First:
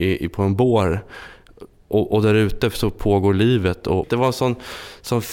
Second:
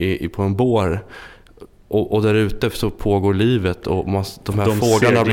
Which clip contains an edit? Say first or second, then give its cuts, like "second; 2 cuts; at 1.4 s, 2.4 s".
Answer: first; 1 cut; at 4.0 s